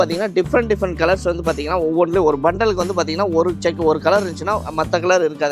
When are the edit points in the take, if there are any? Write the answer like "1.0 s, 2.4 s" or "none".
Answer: none